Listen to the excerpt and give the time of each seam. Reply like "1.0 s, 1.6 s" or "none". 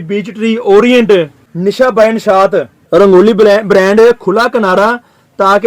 1.4 s, 2.8 s